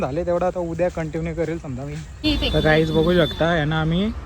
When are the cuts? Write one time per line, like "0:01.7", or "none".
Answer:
0:02.0